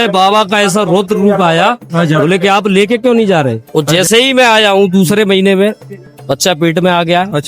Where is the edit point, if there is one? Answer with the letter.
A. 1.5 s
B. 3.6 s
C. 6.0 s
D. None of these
B